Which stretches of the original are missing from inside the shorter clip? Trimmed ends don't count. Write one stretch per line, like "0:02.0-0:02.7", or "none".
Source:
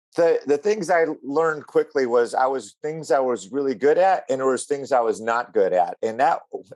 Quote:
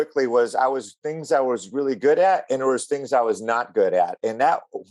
none